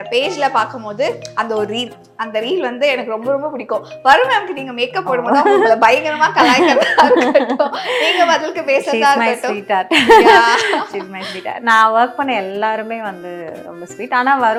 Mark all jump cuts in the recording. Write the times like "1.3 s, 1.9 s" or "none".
none